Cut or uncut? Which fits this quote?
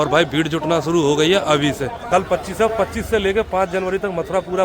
cut